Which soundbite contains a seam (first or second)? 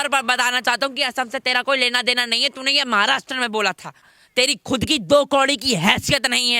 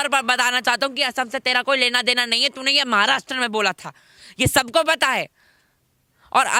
first